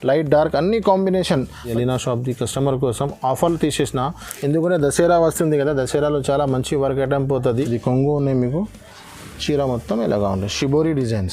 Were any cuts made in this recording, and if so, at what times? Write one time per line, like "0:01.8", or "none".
0:01.7
0:07.5